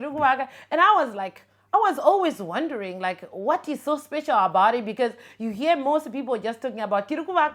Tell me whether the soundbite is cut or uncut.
uncut